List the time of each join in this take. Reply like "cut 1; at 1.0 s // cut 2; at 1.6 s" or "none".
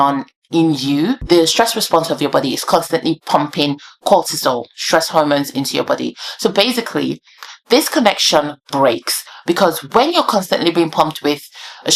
cut 1; at 1.2 s